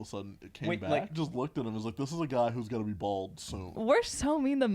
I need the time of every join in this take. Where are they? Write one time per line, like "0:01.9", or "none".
0:01.1
0:03.7